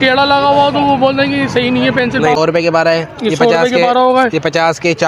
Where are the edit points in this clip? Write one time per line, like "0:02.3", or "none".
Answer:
0:02.4